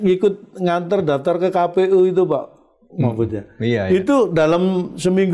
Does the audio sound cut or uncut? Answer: uncut